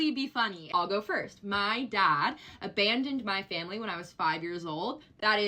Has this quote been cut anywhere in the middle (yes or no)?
no